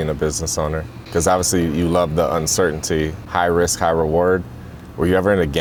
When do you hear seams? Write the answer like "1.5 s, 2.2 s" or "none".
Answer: none